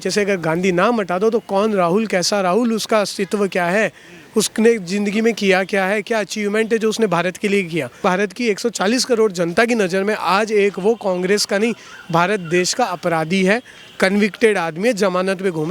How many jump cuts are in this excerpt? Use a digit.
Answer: 1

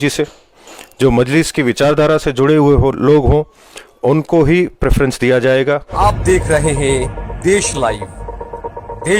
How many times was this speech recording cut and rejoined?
1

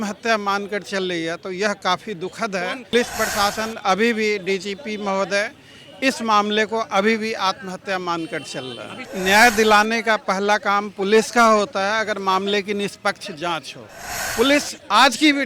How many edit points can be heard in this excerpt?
2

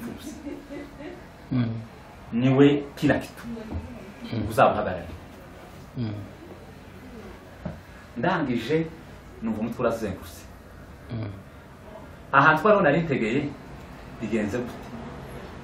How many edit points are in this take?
0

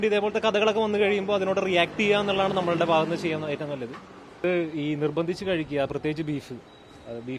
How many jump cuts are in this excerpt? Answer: 1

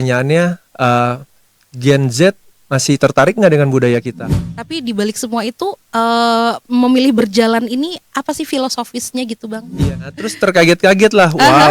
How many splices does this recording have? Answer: 2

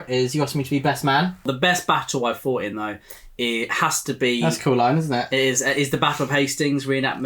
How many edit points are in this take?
1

